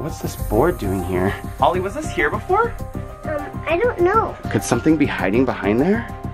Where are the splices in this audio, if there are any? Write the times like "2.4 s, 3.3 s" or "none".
1.4 s, 4.4 s